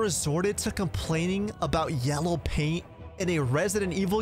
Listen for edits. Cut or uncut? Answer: uncut